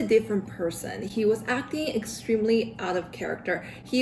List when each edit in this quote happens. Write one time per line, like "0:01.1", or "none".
none

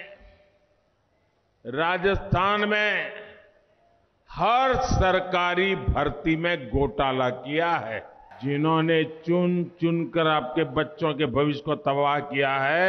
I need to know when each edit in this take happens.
0:08.3

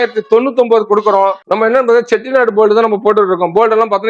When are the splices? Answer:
0:01.4

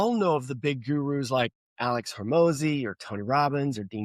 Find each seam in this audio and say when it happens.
0:01.6

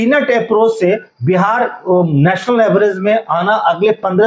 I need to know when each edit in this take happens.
none

